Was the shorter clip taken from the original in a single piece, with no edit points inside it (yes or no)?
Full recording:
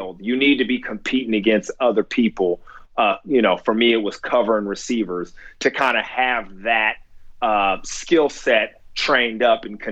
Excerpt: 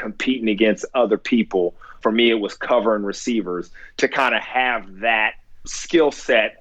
no